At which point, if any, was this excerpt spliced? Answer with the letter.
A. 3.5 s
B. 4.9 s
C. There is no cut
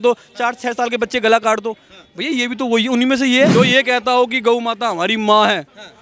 A